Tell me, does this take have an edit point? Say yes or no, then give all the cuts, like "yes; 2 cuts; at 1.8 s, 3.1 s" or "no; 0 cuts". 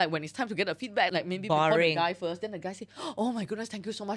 yes; 1 cut; at 1.1 s